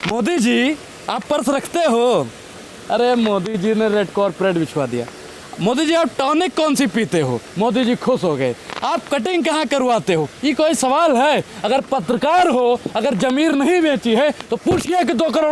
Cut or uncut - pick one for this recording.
uncut